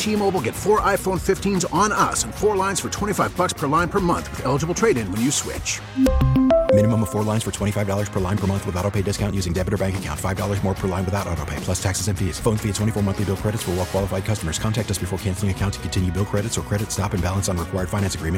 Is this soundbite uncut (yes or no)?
yes